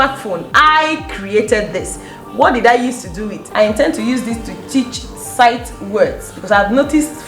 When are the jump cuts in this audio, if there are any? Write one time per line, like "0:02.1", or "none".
0:03.4